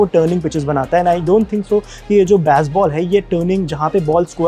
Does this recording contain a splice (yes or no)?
no